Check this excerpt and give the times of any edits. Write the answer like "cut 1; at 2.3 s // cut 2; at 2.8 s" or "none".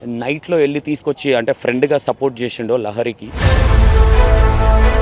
cut 1; at 3.4 s

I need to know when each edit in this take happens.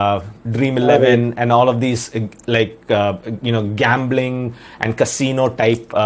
none

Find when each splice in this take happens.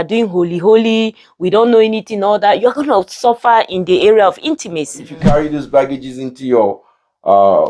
cut 1; at 5.2 s

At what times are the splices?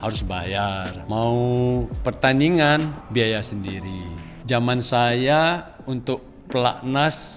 cut 1; at 0.9 s // cut 2; at 1.9 s // cut 3; at 3.0 s // cut 4; at 4.3 s

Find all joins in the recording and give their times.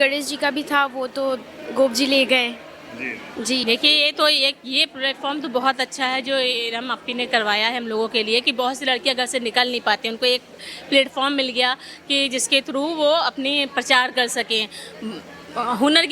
cut 1; at 3.6 s

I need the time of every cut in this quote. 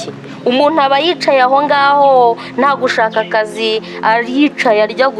none

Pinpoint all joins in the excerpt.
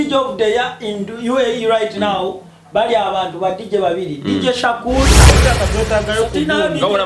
cut 1; at 5.4 s

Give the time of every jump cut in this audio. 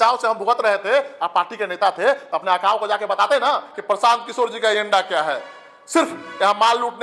cut 1; at 3.7 s

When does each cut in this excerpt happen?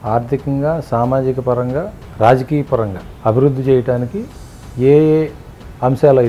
cut 1; at 2.0 s // cut 2; at 3.0 s

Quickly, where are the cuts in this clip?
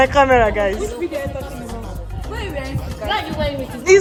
none

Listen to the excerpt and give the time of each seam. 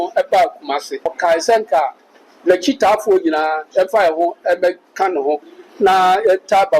cut 1; at 1.1 s

